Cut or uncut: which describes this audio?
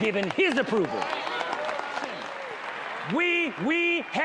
cut